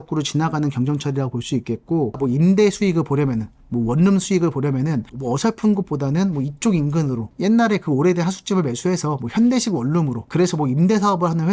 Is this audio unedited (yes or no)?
no